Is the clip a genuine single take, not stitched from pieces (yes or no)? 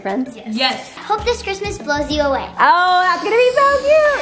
no